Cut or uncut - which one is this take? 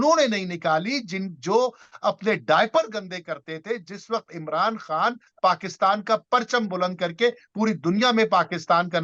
uncut